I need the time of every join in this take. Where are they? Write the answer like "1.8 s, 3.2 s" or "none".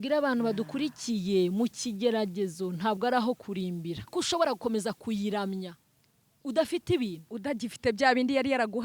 4.1 s